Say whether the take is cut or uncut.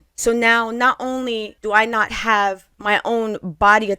cut